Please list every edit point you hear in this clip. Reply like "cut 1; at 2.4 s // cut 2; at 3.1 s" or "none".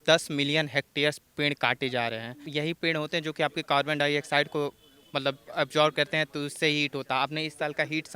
cut 1; at 2.4 s